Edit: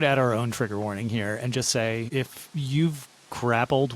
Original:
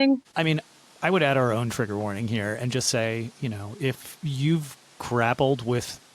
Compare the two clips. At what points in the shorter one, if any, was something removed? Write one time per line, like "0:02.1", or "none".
0:02.1